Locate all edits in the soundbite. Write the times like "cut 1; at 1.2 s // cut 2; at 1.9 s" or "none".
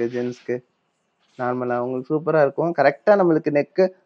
none